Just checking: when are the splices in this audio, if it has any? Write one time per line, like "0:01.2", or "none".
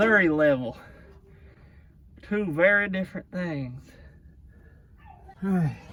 none